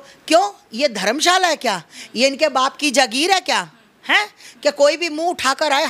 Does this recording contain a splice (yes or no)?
no